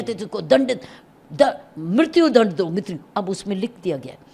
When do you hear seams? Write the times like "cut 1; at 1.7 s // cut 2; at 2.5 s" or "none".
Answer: none